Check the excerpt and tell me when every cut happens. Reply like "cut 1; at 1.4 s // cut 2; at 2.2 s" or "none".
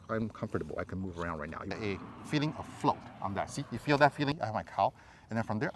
cut 1; at 1.7 s // cut 2; at 4.4 s